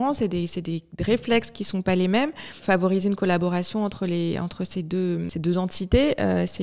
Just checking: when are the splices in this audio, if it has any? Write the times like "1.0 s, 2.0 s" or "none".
2.6 s, 5.3 s